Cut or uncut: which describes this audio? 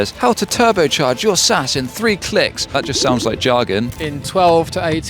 cut